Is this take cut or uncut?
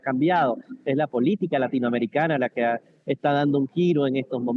uncut